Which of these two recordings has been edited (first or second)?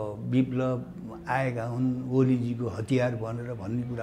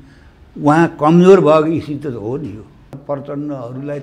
second